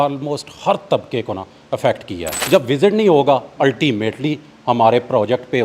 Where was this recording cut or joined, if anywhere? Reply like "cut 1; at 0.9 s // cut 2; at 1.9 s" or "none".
cut 1; at 2.3 s